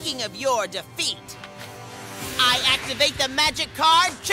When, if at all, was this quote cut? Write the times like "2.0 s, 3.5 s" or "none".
none